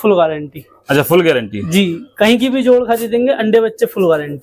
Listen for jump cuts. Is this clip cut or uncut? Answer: uncut